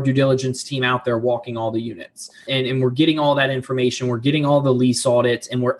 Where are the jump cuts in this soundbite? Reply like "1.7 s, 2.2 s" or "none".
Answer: 2.4 s